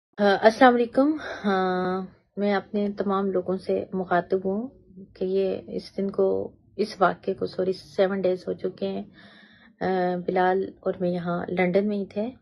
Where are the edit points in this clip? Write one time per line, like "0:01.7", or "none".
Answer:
0:00.9